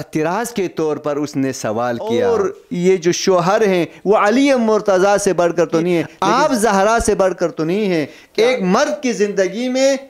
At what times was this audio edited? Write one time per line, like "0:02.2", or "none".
0:02.1
0:06.1
0:08.2